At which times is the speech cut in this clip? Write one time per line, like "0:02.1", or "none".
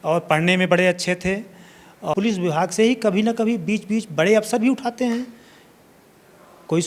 0:02.1